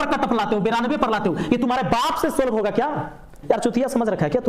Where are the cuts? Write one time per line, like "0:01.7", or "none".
0:03.4